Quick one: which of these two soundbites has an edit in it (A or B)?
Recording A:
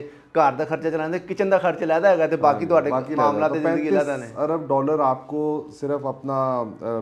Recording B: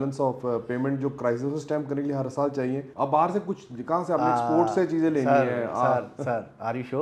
B